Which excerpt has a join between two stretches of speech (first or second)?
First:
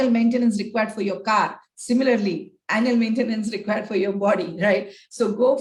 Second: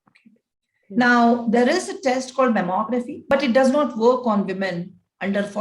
second